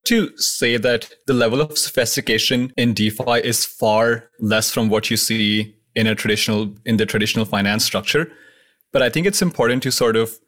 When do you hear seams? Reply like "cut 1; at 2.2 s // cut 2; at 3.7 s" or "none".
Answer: cut 1; at 1.1 s // cut 2; at 2.7 s